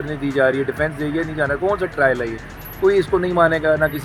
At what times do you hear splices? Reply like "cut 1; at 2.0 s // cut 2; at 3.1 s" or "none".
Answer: none

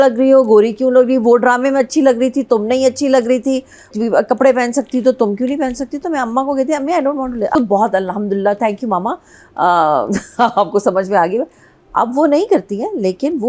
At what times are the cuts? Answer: cut 1; at 3.9 s // cut 2; at 7.5 s

